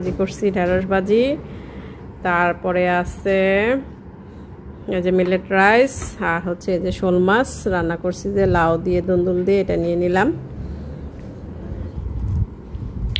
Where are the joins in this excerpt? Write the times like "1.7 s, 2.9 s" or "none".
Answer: 11.9 s